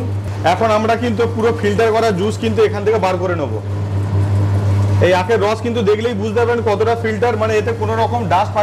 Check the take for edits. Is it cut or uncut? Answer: uncut